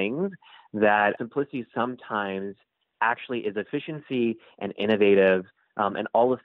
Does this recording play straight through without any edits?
no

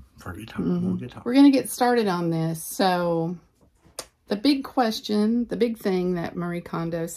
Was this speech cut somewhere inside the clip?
no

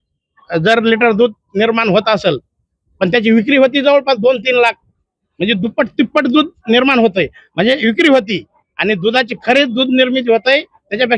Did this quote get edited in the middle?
no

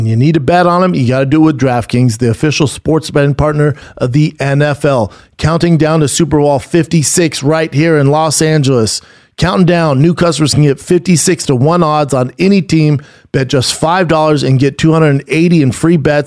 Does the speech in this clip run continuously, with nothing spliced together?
yes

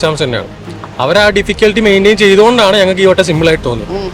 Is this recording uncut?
yes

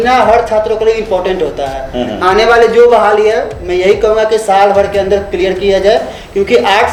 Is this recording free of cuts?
yes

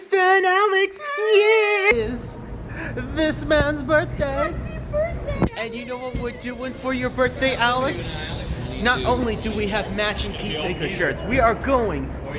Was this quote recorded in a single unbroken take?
no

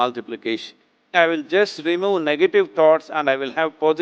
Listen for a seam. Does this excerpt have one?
yes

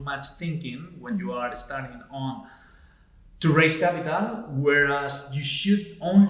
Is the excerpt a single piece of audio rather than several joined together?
yes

